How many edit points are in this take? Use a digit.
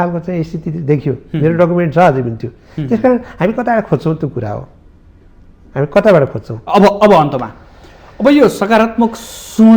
0